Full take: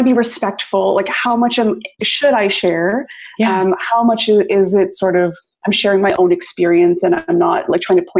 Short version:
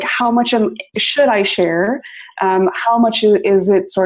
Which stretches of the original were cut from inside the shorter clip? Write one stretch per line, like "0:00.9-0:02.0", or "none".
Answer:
none